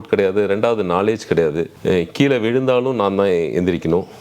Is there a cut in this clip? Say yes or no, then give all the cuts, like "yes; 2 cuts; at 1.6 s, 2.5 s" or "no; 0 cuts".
yes; 1 cut; at 1.7 s